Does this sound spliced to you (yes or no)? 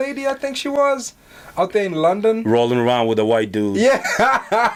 no